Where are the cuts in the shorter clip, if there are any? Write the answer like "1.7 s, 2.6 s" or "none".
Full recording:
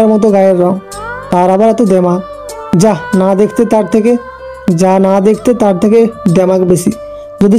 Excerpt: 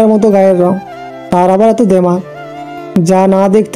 2.6 s